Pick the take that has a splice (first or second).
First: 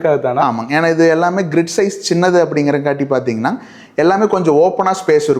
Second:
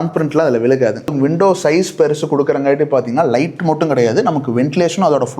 second